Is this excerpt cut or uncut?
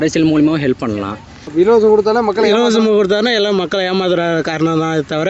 cut